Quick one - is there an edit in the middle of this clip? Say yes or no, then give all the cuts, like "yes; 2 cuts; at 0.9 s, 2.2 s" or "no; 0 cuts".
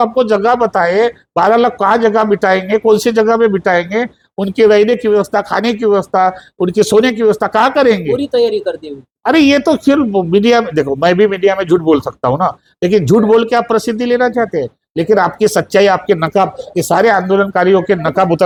no; 0 cuts